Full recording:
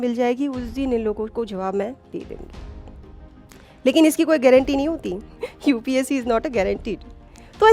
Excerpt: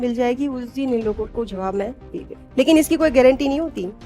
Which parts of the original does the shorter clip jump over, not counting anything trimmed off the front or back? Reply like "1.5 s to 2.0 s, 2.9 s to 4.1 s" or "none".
2.4 s to 3.6 s